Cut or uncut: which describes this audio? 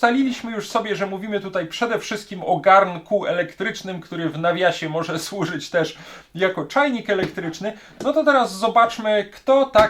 uncut